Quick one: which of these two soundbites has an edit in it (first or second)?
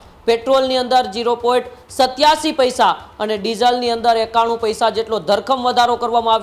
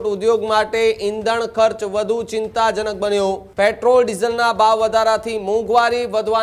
second